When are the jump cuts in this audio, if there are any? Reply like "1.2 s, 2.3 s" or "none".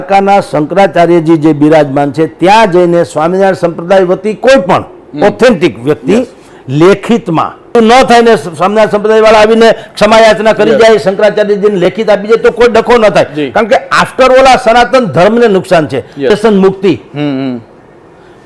7.7 s, 16.3 s